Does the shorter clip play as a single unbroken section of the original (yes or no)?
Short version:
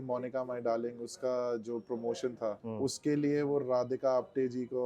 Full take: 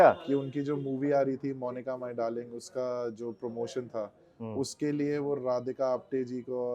no